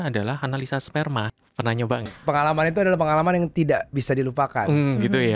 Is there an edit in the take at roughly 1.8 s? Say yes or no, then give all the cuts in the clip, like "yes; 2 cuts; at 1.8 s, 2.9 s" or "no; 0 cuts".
yes; 1 cut; at 1.8 s